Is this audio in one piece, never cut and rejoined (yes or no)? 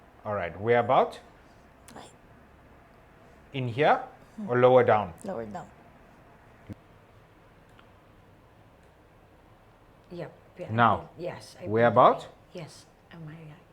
no